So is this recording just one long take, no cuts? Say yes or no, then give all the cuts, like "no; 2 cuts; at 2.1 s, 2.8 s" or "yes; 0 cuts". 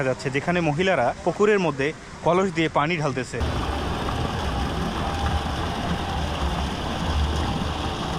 yes; 0 cuts